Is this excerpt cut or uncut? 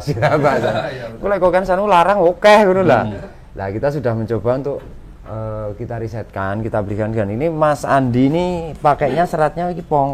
uncut